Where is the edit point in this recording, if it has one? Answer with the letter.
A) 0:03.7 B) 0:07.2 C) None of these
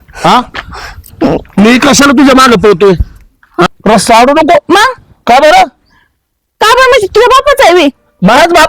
A